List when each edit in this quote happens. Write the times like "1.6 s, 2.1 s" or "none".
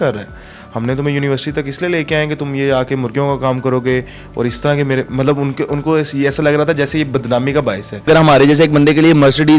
8.1 s

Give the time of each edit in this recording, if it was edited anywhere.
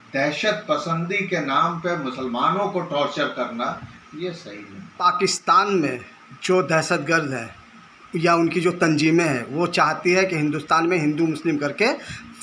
5.0 s

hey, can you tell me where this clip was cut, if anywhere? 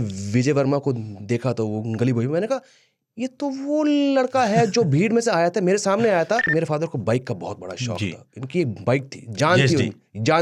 6.5 s

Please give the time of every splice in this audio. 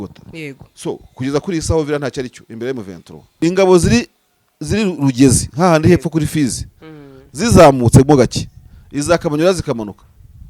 3.3 s

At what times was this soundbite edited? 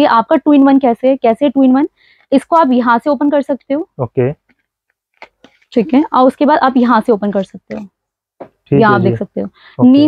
none

